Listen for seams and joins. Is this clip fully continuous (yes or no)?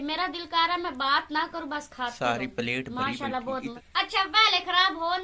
no